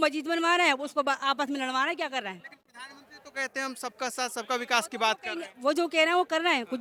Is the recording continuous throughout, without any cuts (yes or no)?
yes